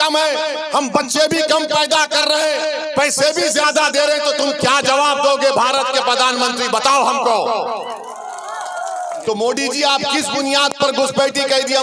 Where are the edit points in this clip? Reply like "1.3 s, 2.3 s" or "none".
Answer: 9.2 s